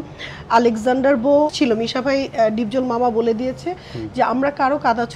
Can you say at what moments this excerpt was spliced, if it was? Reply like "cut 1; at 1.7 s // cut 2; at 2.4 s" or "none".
cut 1; at 1.5 s